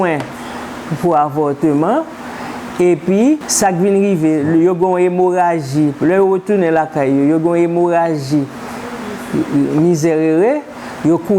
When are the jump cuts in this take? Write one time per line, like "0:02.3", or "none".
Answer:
0:03.5